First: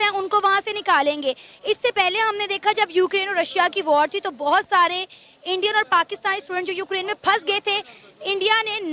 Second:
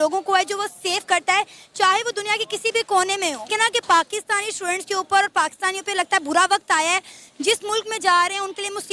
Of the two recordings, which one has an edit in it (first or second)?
second